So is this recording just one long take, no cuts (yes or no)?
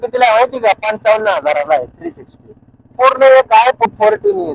no